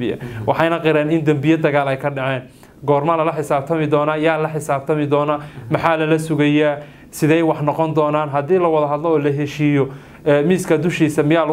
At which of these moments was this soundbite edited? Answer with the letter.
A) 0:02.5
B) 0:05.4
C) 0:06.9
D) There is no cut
D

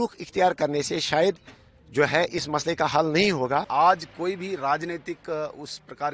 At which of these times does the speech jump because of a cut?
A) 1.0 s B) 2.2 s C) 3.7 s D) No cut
C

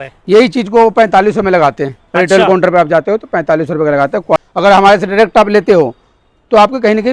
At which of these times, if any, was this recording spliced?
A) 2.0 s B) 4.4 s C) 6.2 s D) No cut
B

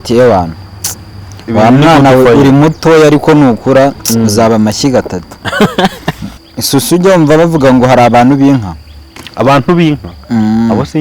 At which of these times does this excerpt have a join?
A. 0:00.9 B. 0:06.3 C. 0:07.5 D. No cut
B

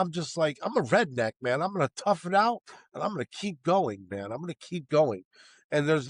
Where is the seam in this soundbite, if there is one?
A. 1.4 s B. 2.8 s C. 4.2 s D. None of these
D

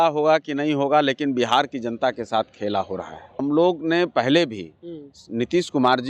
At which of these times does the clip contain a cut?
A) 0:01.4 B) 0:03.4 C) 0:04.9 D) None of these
B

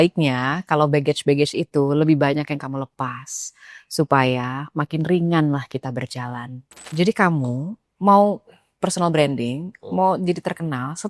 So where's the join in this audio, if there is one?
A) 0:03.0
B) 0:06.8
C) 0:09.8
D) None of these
B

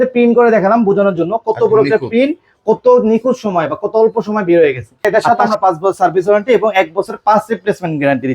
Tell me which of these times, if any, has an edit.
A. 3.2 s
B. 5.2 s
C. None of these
B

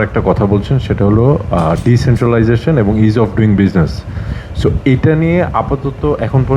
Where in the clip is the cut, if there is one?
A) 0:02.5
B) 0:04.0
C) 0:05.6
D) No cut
D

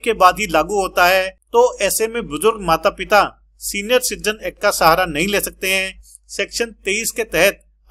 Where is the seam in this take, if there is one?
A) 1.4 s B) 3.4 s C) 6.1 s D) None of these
A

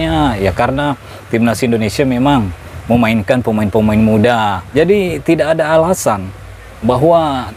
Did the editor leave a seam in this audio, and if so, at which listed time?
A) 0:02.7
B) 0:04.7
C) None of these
B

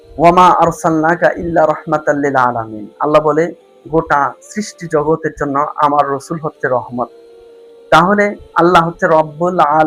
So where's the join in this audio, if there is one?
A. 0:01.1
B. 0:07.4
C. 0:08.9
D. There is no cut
D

